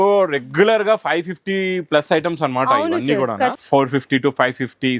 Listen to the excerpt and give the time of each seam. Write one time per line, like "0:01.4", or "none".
0:03.6

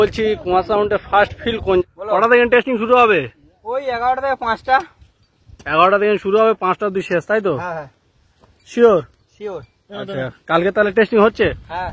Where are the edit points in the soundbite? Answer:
0:01.8

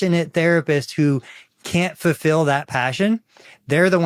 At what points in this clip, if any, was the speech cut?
none

